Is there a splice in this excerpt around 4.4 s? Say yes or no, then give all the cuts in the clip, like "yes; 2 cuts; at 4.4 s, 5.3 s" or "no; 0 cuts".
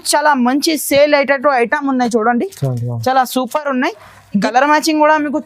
yes; 1 cut; at 4.4 s